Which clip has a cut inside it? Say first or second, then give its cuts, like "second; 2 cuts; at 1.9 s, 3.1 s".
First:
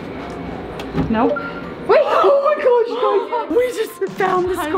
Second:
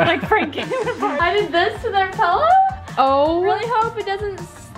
second; 1 cut; at 1.2 s